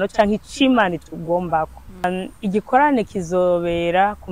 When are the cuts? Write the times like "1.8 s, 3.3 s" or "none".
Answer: 2.0 s